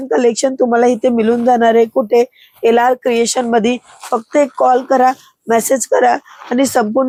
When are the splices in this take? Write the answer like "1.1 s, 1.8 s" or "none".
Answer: none